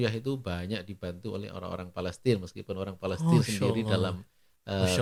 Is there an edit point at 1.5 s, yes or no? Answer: no